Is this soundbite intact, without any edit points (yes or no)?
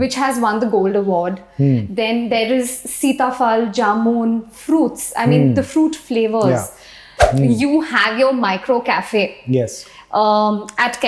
no